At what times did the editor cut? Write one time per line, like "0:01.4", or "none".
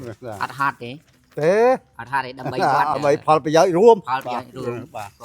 0:01.2
0:02.9